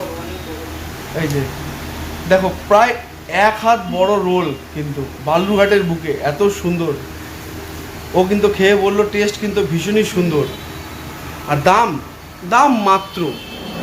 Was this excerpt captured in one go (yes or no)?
yes